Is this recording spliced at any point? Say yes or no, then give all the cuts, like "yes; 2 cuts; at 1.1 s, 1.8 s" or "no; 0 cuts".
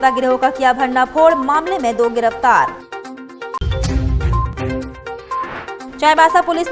no; 0 cuts